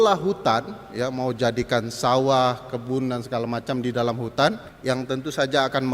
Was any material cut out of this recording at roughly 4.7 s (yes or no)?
yes